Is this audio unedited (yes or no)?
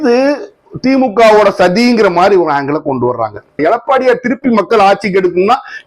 no